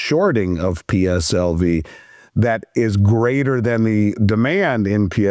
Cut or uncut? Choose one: uncut